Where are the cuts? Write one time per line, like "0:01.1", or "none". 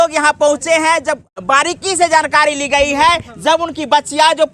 0:01.3